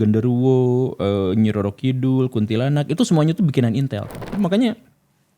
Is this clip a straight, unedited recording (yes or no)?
no